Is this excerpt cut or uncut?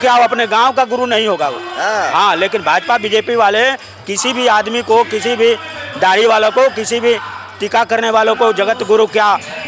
uncut